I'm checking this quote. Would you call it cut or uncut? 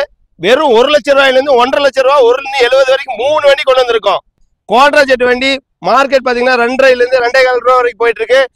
uncut